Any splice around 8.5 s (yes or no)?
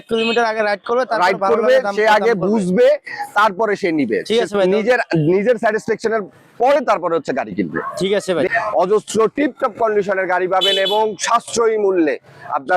yes